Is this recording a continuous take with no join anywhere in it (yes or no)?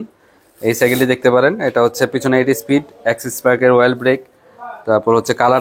yes